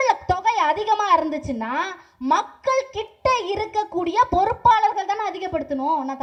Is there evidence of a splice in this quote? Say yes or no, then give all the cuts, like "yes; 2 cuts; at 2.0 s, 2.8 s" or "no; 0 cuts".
no; 0 cuts